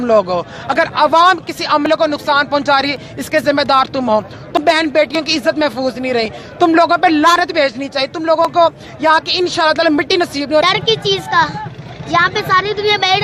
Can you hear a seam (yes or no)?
yes